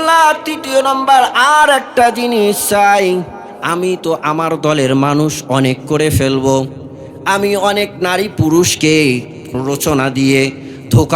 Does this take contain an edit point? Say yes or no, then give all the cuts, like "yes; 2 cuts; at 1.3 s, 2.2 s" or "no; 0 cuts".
yes; 1 cut; at 9.5 s